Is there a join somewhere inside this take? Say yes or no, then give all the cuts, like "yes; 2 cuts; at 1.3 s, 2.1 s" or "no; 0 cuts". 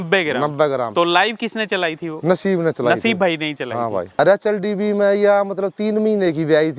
yes; 1 cut; at 4.2 s